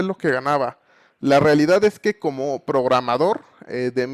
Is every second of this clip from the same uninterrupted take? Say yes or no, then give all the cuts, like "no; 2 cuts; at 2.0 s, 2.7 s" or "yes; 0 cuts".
yes; 0 cuts